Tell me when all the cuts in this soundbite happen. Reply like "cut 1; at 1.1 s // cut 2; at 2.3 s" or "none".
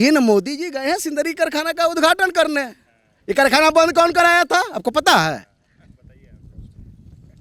none